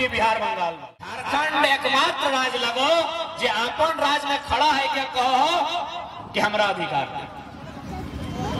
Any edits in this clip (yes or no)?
yes